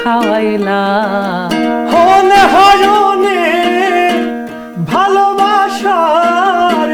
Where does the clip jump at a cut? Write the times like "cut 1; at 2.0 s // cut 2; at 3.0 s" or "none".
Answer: none